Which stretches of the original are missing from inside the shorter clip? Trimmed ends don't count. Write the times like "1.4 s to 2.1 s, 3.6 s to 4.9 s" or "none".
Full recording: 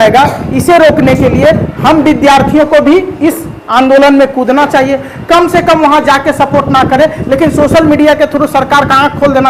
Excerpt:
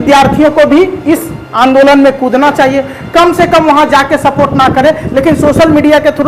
none